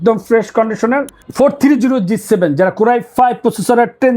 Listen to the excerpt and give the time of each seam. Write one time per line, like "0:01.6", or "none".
0:01.2